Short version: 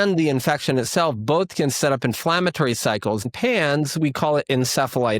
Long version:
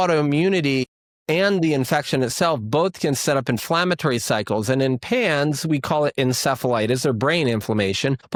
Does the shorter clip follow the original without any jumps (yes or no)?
no